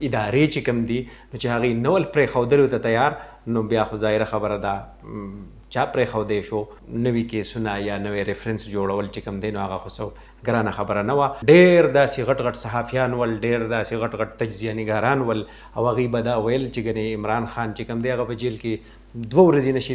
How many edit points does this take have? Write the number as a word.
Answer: two